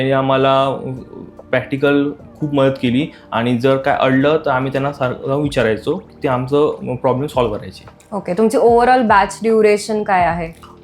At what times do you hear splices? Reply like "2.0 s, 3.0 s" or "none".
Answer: none